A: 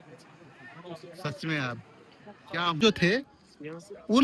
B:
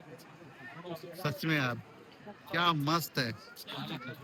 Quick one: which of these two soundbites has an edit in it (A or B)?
A